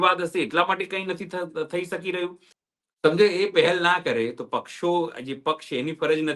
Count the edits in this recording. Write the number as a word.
one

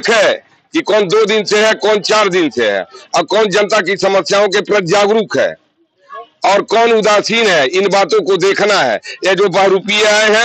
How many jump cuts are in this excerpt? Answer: zero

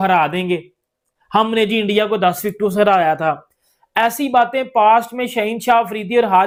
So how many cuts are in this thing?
zero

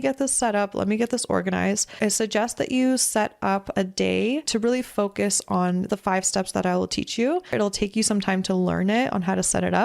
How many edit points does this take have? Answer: four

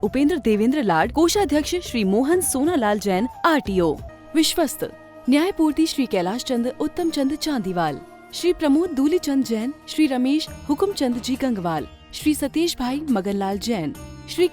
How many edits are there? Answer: one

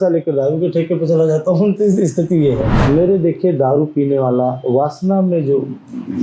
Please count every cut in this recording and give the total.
one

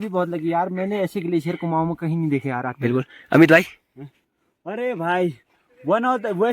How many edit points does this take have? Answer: zero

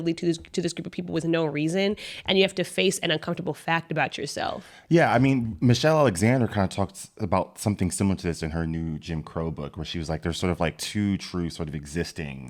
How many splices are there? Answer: zero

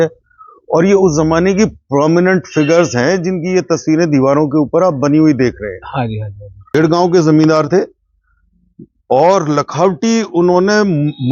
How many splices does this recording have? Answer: one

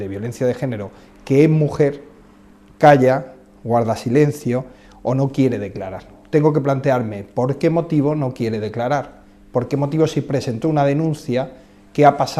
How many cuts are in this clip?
one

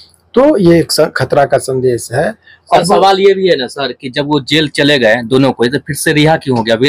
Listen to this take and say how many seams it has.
one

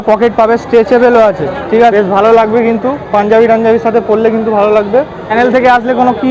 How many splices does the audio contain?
two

